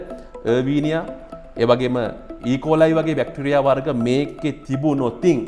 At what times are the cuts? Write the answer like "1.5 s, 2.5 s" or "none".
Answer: none